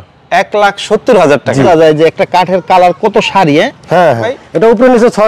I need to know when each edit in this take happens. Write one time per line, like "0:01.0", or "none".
0:01.7
0:04.3